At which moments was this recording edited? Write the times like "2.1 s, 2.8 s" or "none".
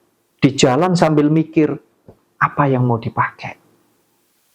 none